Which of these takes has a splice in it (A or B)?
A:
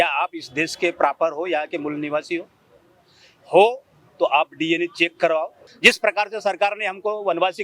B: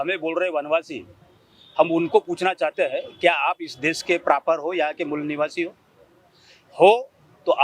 A